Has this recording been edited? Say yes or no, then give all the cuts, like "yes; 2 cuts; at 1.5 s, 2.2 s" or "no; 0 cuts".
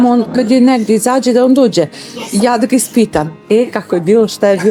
no; 0 cuts